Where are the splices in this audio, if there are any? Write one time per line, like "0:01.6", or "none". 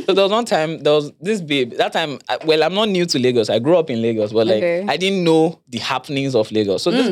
none